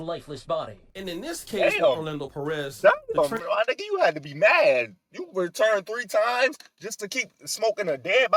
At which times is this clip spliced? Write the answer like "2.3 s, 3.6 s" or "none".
none